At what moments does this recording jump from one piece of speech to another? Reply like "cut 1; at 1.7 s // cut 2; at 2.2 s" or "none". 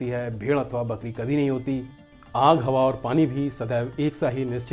none